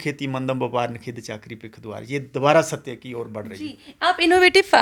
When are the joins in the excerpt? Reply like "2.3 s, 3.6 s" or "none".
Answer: none